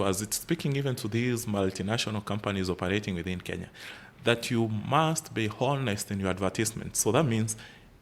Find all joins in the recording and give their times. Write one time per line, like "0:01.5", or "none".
none